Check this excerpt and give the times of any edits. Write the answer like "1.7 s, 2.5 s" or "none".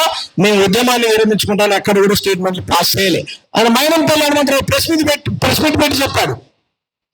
3.4 s